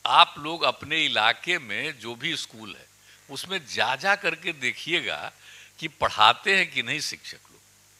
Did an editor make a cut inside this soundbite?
no; 0 cuts

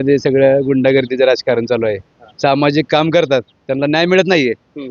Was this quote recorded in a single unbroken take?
yes; 0 cuts

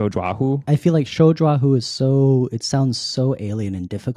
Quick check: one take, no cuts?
yes; 0 cuts

